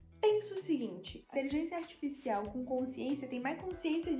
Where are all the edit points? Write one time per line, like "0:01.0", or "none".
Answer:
0:01.3